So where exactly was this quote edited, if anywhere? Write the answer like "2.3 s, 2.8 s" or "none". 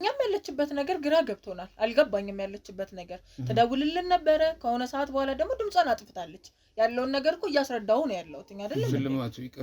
none